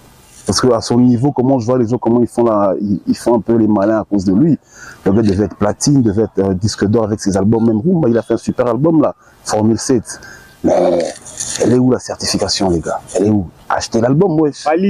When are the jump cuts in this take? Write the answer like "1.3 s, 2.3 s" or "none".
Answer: none